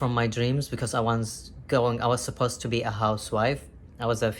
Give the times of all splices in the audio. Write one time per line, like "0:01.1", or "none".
none